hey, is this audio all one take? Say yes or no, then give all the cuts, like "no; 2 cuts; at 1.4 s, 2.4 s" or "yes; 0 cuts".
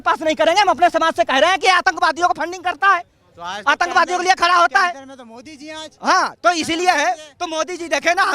yes; 0 cuts